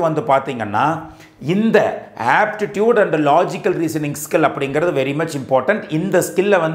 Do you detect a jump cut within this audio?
no; 0 cuts

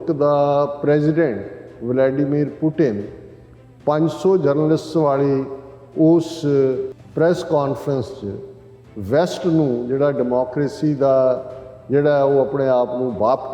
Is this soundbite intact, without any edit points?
no; 1 cut; at 7.0 s

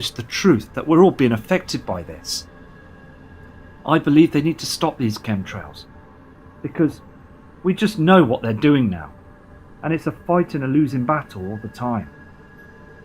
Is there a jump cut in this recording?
yes; 1 cut; at 1.2 s

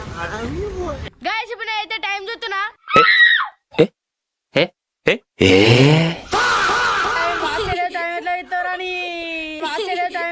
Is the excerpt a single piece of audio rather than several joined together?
yes; 0 cuts

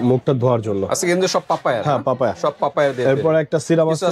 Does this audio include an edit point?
no; 0 cuts

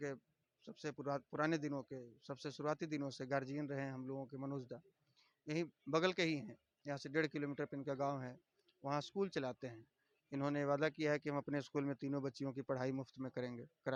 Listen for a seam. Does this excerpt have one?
no; 0 cuts

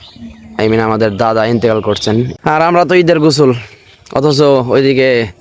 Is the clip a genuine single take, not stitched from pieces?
no; 1 cut; at 2.3 s

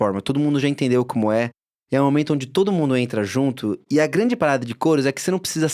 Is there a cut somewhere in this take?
no; 0 cuts

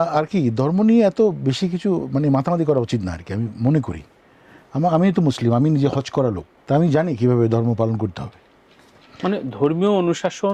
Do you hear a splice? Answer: no; 0 cuts

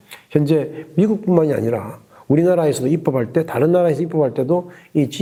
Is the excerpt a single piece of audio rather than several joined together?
yes; 0 cuts

